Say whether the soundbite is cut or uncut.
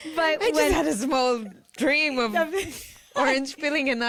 uncut